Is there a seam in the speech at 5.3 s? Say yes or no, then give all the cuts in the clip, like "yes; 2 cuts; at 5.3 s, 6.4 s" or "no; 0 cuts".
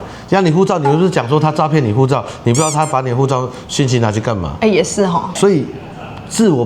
yes; 1 cut; at 5.3 s